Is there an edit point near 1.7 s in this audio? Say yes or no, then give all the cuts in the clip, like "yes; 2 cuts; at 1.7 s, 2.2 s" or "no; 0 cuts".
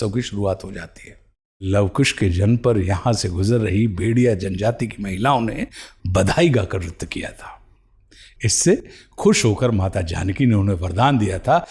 yes; 1 cut; at 1.7 s